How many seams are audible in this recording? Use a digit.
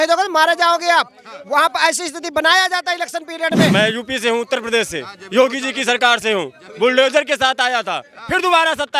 1